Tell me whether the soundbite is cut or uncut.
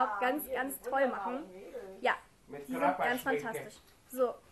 cut